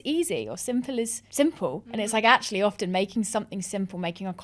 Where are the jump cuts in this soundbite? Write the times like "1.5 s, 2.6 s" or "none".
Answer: none